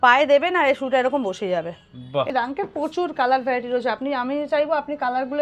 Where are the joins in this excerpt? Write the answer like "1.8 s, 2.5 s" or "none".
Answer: 2.3 s